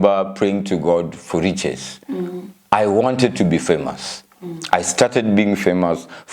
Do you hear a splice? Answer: no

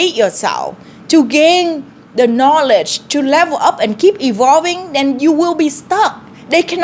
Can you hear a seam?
no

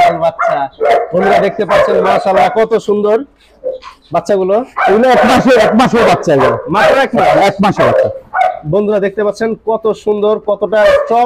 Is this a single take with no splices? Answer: yes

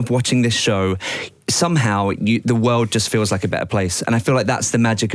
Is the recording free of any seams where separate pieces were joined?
yes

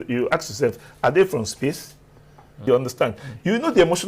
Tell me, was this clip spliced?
yes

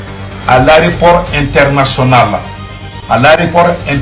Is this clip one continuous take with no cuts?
no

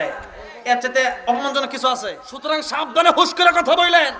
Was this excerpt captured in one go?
no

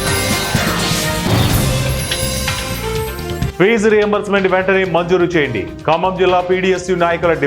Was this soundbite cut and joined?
yes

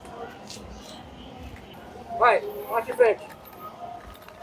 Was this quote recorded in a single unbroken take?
yes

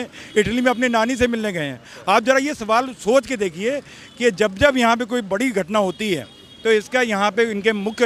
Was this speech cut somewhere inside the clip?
no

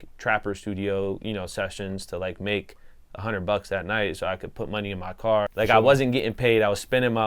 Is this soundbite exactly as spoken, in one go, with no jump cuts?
no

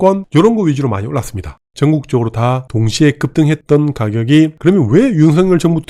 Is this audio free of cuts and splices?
no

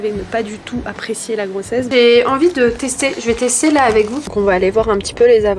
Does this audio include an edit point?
yes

